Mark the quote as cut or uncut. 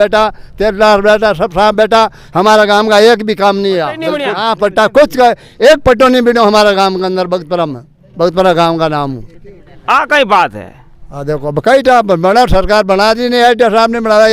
cut